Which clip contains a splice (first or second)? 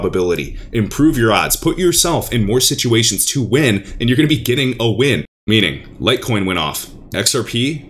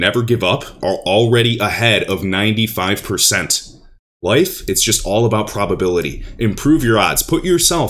first